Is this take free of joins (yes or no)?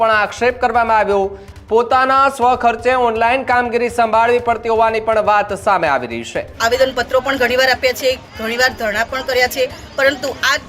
no